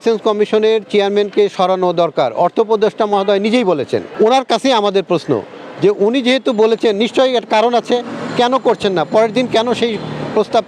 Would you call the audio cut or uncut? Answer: uncut